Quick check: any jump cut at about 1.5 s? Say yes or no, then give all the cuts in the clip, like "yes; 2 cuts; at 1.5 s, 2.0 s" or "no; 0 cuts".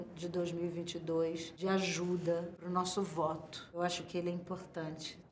yes; 3 cuts; at 1.5 s, 2.6 s, 3.6 s